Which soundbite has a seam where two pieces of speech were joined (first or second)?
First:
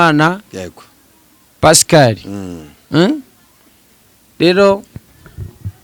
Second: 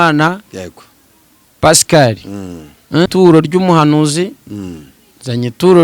second